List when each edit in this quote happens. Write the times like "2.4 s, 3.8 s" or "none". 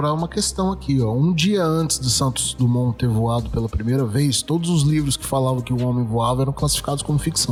none